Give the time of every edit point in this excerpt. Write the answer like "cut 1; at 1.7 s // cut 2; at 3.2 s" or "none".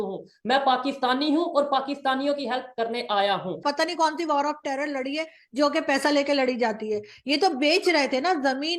cut 1; at 3.6 s